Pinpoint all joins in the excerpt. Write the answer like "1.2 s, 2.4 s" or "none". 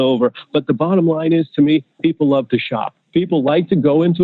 3.0 s